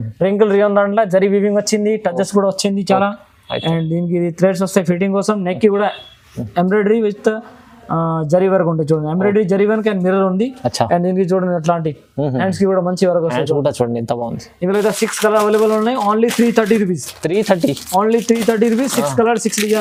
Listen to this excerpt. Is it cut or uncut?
uncut